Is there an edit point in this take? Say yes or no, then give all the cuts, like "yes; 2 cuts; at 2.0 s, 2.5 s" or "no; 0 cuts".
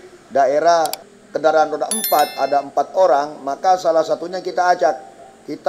yes; 1 cut; at 1.0 s